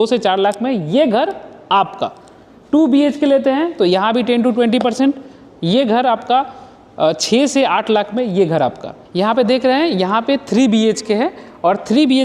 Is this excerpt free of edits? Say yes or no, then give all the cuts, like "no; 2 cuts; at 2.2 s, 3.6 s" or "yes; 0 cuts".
yes; 0 cuts